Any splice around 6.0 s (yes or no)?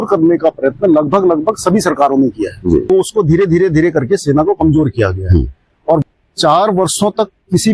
yes